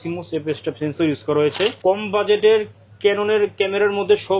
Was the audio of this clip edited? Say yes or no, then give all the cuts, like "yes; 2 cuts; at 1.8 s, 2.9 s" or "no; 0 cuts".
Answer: yes; 1 cut; at 1.8 s